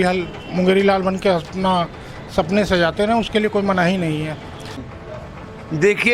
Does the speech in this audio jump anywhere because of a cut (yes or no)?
yes